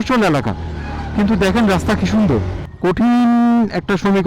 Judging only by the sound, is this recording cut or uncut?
cut